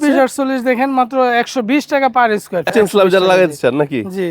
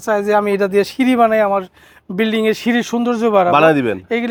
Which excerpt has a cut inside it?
first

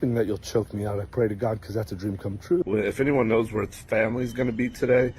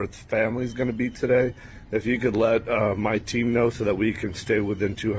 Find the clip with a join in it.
first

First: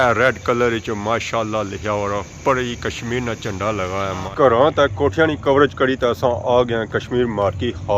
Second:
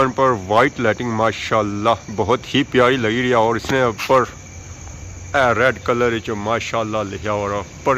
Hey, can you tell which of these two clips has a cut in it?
first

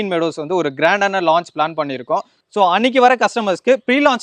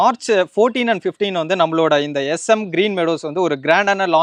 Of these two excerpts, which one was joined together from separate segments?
first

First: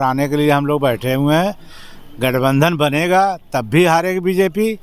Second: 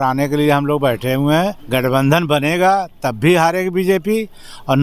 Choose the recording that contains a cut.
second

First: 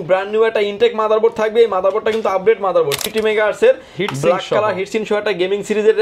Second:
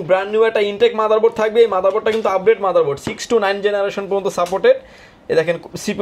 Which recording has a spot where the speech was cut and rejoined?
first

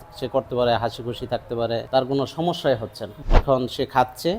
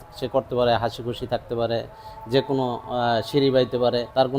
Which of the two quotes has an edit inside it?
first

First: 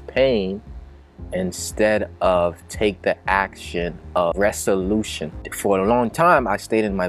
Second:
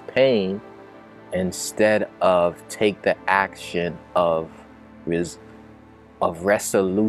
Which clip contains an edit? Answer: first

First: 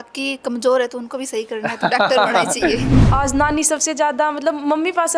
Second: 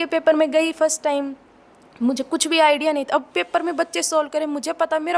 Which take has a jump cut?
first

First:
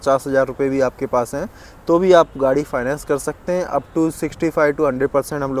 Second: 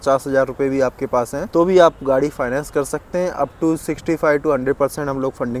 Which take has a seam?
second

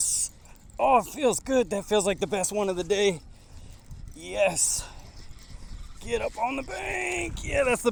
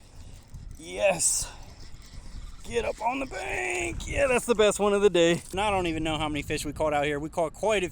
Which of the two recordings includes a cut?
second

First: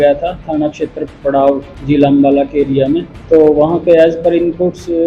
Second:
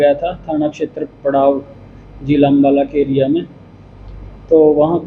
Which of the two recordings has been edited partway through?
first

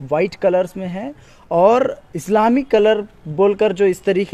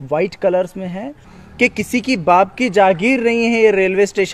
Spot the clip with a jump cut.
second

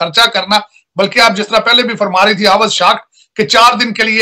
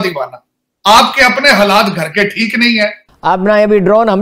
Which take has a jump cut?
second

